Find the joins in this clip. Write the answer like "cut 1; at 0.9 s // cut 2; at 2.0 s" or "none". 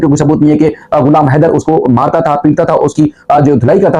none